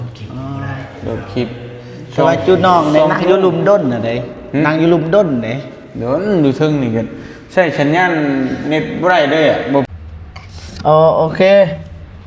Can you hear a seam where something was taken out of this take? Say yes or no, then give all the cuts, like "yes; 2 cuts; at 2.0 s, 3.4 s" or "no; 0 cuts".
yes; 1 cut; at 9.9 s